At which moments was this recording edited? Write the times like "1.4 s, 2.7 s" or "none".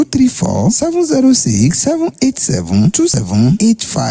3.0 s